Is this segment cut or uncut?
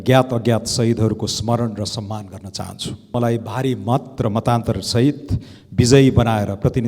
cut